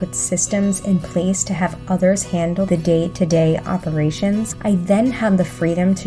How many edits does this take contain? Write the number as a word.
one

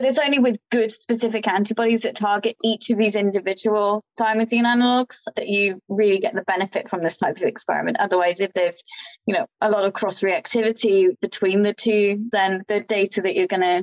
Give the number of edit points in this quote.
one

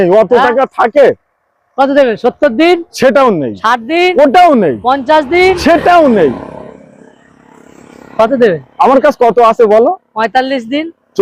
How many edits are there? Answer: zero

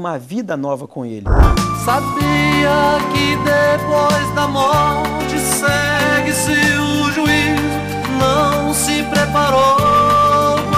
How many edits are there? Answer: one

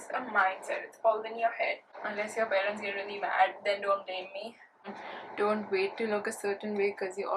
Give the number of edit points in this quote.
two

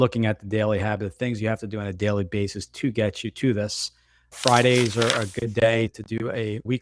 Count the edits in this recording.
one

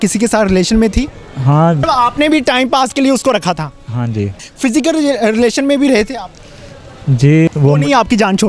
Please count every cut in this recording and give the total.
three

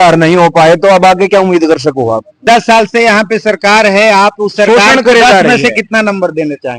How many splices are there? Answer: one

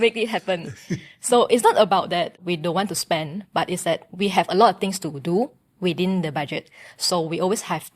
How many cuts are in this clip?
one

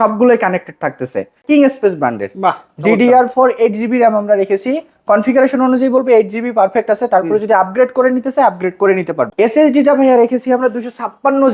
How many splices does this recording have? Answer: two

